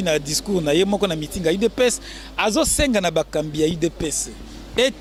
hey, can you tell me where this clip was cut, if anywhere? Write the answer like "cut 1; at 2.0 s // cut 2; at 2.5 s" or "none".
none